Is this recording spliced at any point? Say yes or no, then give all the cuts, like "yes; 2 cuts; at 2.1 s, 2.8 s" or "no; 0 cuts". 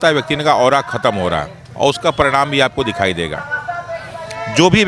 yes; 1 cut; at 1.6 s